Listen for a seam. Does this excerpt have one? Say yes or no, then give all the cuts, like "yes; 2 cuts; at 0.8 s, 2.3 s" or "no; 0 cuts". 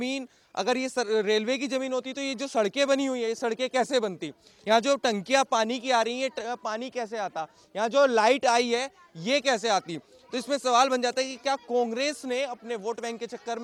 no; 0 cuts